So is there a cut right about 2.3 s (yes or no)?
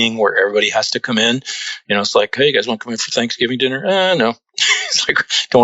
yes